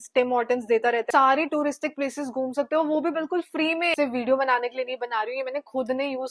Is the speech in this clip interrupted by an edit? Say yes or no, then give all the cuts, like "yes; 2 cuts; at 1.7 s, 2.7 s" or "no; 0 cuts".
yes; 2 cuts; at 1.1 s, 3.9 s